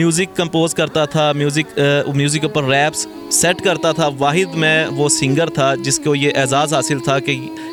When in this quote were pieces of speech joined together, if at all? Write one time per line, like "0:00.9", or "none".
none

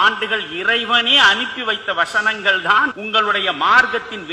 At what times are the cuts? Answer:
0:03.0

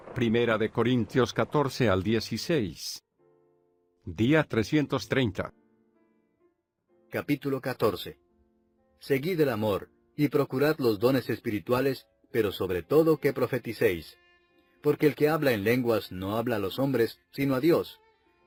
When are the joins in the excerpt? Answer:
none

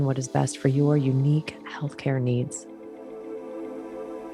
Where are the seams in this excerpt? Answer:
0:02.6

